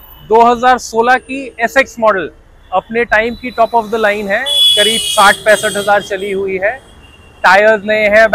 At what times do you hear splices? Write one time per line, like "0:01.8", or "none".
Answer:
none